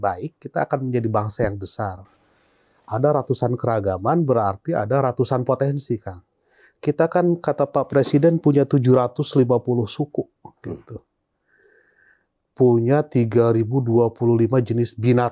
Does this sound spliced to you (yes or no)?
no